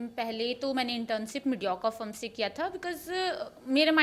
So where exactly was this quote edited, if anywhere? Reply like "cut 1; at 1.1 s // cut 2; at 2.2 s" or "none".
none